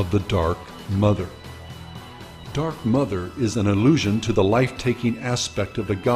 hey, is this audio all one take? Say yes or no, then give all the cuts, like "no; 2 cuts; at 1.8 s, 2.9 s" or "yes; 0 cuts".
yes; 0 cuts